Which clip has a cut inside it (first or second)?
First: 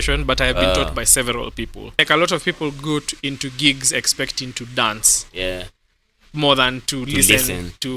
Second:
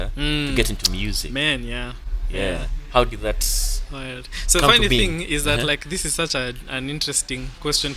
first